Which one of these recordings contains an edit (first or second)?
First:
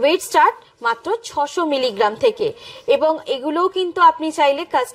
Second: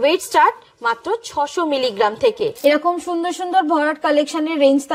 second